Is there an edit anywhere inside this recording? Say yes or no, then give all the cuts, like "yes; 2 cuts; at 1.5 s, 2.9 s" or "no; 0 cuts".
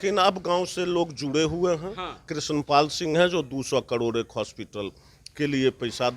yes; 1 cut; at 2.3 s